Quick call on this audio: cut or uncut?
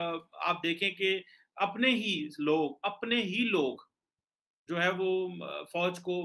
uncut